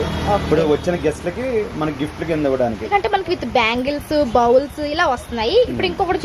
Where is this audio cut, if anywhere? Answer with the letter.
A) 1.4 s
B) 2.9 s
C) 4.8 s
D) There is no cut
B